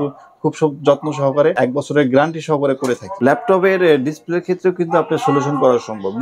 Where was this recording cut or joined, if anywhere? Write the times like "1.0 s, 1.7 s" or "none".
1.6 s, 3.1 s